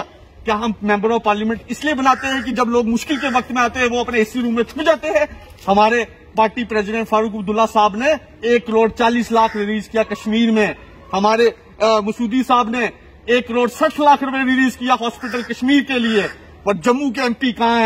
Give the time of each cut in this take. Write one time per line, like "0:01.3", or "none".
0:05.5